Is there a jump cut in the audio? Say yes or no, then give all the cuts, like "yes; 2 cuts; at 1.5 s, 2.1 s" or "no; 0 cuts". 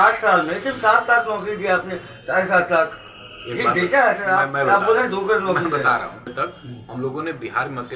yes; 1 cut; at 6.3 s